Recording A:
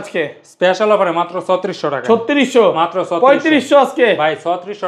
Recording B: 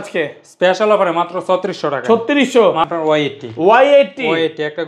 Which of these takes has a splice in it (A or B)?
B